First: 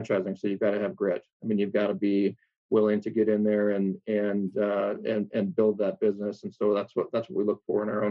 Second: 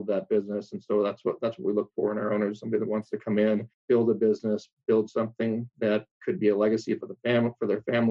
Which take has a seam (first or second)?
second